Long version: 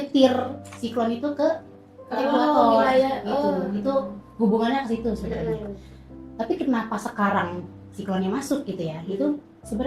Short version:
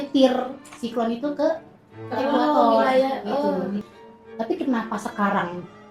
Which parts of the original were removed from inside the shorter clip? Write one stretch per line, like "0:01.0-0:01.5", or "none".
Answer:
0:03.8-0:05.8